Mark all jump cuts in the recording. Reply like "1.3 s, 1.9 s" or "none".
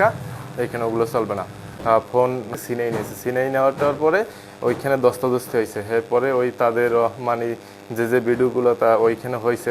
1.6 s, 2.6 s